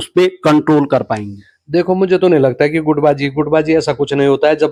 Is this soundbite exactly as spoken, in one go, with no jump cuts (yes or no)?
yes